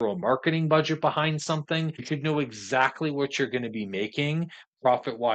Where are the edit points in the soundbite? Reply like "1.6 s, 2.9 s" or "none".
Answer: 2.0 s